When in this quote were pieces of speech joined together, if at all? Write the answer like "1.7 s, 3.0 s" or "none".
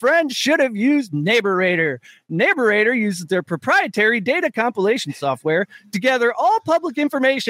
none